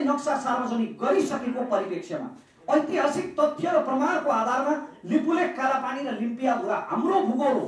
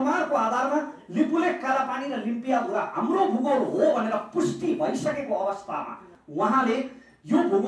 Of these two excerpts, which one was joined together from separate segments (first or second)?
second